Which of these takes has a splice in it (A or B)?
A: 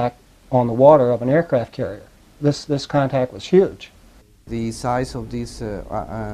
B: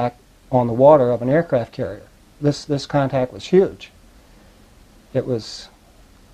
A